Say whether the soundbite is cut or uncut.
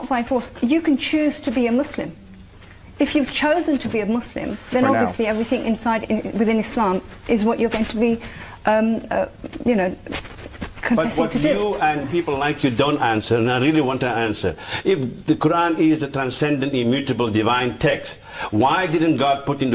uncut